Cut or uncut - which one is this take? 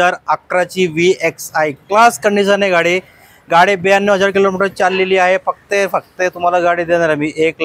uncut